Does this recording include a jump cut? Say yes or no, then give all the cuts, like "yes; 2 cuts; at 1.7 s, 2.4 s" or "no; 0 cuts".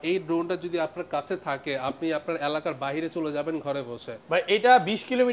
no; 0 cuts